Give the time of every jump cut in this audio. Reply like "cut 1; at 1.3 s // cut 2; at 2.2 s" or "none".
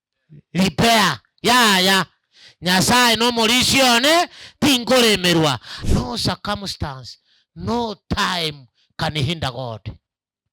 cut 1; at 5.7 s